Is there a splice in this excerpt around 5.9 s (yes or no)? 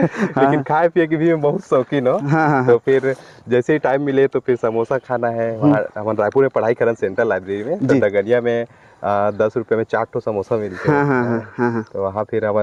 no